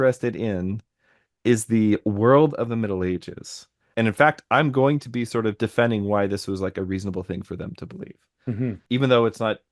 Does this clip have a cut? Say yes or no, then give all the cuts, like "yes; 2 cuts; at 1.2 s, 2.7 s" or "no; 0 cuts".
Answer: yes; 2 cuts; at 3.8 s, 8.8 s